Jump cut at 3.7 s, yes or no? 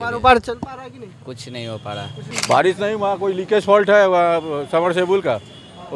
no